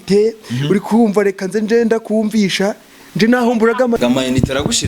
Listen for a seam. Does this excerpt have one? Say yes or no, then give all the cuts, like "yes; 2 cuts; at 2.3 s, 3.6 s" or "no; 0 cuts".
yes; 1 cut; at 4.0 s